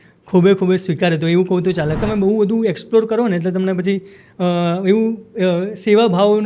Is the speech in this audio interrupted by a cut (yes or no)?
yes